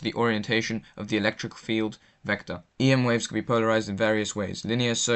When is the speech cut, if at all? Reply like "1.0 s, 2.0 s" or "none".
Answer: none

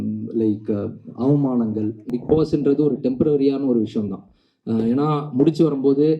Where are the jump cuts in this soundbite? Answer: 2.1 s

